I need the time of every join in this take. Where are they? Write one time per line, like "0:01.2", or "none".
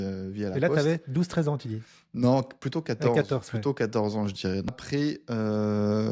0:05.1